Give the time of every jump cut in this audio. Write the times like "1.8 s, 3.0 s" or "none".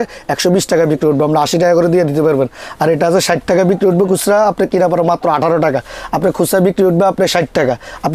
none

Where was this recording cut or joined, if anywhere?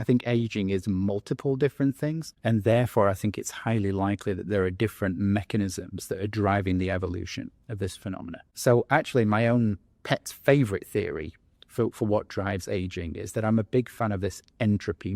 2.3 s, 8.5 s

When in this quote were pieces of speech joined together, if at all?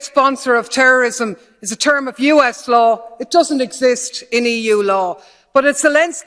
5.2 s

